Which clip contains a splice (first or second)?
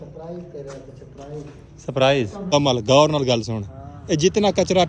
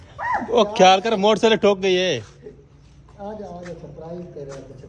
first